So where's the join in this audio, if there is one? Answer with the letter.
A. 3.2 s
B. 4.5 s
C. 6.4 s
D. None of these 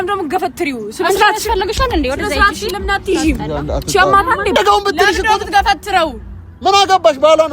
B